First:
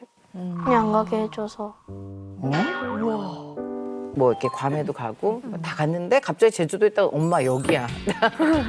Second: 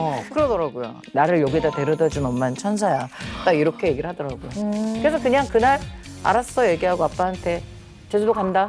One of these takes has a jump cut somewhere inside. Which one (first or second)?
first